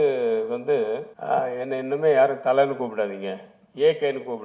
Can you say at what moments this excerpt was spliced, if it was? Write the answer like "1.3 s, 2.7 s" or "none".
1.1 s